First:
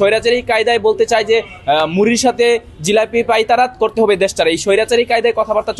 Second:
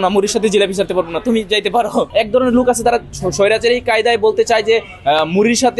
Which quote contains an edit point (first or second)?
second